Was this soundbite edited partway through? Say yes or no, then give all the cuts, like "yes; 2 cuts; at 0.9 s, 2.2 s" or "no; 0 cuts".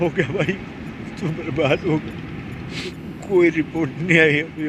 yes; 1 cut; at 2.9 s